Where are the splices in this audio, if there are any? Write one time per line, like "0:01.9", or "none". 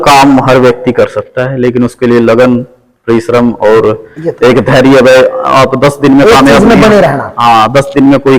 none